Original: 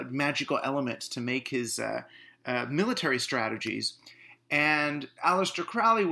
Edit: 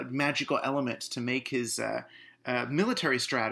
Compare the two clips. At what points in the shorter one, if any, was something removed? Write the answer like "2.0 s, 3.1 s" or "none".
none